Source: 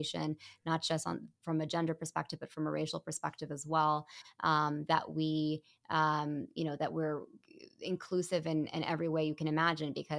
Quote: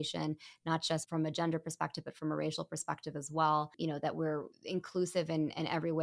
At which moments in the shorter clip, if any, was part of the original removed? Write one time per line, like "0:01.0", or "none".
0:01.0
0:04.0